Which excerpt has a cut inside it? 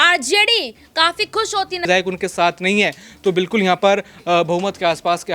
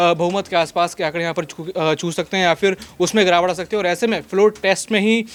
first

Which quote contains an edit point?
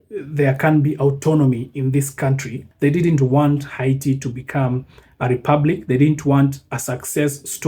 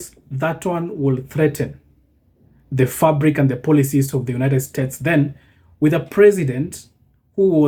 first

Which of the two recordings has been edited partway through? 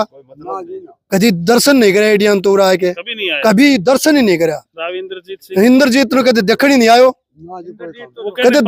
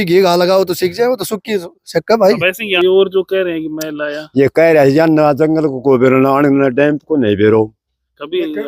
second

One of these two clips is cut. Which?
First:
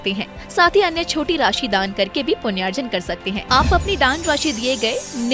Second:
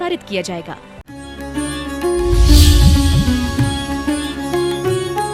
second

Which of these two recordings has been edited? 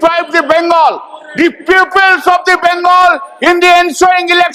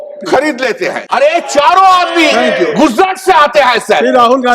second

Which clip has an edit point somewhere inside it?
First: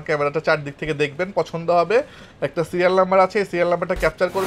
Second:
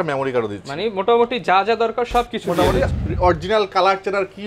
second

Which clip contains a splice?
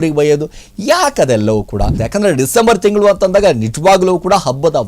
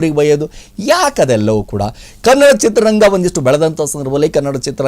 first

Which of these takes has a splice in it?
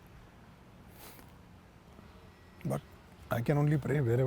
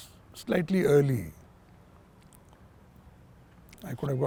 first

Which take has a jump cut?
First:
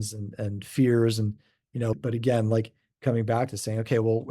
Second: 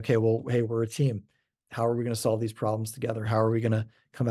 first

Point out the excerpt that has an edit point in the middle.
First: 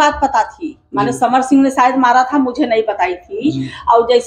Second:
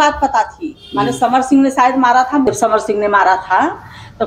second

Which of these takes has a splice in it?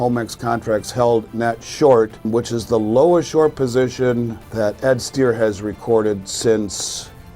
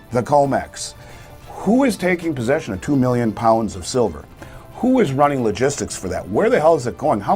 first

